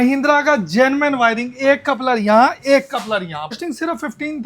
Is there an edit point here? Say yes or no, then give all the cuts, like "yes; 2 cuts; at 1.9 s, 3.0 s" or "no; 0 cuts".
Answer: yes; 1 cut; at 3.6 s